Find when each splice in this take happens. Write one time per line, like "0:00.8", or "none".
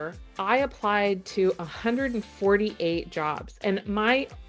none